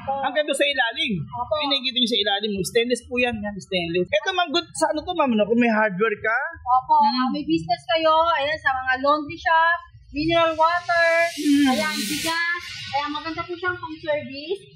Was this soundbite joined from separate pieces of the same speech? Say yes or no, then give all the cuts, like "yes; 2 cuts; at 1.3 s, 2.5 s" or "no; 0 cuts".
yes; 1 cut; at 4.1 s